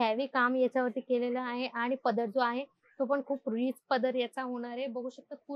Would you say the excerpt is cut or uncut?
uncut